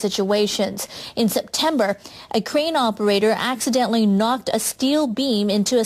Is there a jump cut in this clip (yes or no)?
no